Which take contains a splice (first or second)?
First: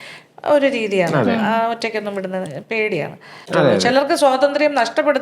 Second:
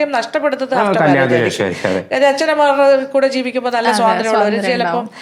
first